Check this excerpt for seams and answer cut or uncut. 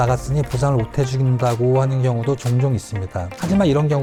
uncut